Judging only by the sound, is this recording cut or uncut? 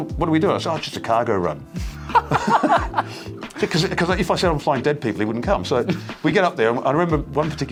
uncut